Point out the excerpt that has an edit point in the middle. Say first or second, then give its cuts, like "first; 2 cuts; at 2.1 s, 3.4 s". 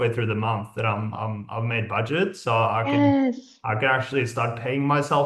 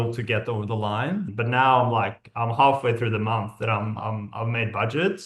second; 1 cut; at 1.3 s